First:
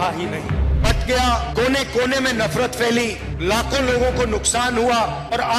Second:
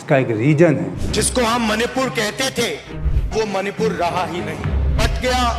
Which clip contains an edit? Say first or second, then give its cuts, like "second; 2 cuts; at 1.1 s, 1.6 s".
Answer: second; 1 cut; at 1.0 s